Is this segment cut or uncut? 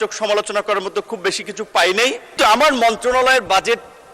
cut